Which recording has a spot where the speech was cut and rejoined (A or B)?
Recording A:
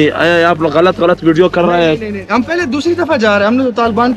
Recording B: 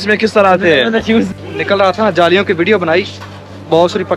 B